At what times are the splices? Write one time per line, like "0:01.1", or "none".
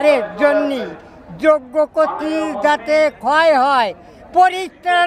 none